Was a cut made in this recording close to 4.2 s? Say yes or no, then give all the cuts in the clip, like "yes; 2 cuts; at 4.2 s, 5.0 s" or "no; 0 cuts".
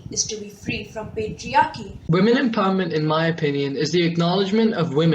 no; 1 cut; at 1.9 s